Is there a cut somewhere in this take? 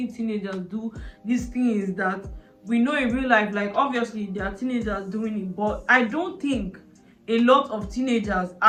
no; 0 cuts

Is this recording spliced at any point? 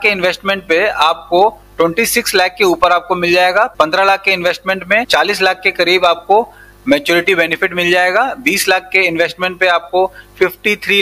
no; 0 cuts

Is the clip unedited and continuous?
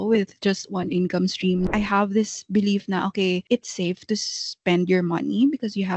no; 2 cuts; at 1.6 s, 3.4 s

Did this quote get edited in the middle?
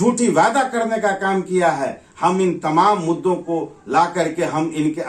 no; 0 cuts

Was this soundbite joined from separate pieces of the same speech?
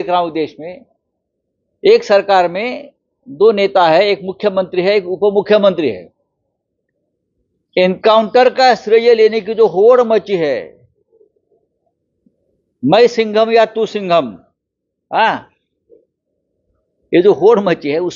no; 0 cuts

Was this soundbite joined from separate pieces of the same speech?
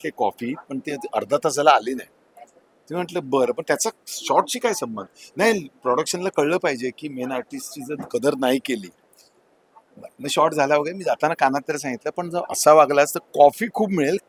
no; 0 cuts

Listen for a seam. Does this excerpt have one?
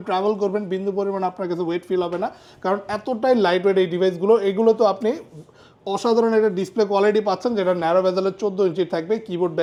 no; 0 cuts

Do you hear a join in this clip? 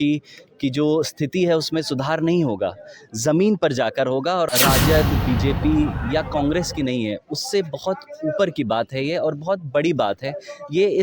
yes; 1 cut; at 4.5 s

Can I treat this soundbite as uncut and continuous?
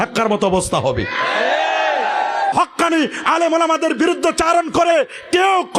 no; 1 cut; at 2.5 s

